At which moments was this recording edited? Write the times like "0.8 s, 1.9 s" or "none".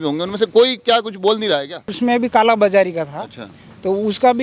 1.9 s